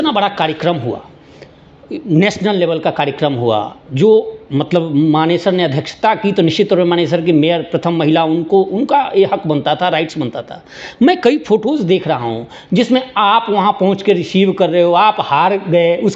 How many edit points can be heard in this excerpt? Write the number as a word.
zero